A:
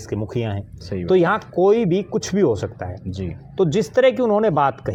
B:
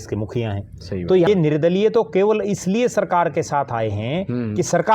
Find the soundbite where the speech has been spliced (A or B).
B